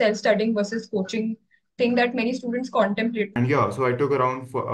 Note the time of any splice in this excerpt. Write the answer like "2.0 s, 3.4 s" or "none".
3.3 s